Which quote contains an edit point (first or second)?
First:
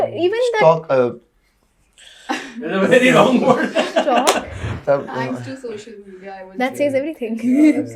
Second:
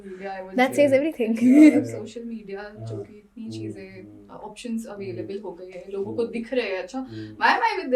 first